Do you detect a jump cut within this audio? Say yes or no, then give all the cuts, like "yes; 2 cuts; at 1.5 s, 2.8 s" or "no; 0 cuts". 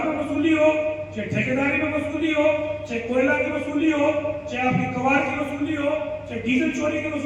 no; 0 cuts